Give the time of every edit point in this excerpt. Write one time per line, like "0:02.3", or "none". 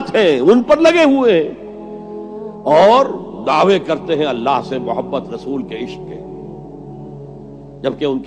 none